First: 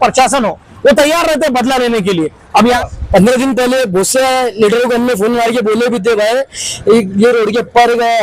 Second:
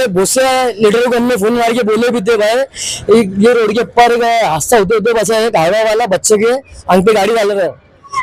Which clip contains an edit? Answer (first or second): first